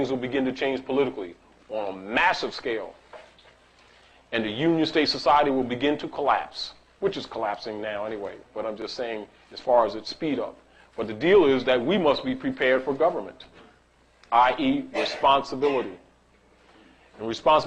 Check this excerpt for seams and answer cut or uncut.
cut